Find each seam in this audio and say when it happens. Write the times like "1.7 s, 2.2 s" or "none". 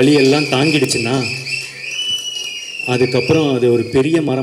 none